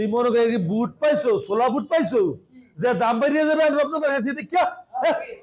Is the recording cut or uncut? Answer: uncut